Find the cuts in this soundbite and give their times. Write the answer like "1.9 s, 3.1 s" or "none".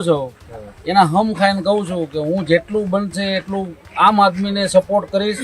none